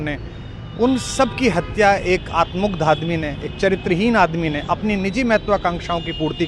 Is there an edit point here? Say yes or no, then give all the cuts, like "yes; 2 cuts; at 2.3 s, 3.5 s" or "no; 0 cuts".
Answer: no; 0 cuts